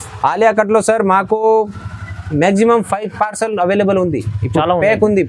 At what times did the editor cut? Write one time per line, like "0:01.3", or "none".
none